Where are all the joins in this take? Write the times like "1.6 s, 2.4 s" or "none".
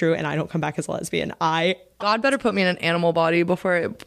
2.0 s